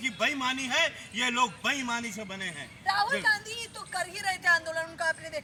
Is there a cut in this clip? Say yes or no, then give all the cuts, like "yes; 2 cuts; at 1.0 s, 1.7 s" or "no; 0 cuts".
no; 0 cuts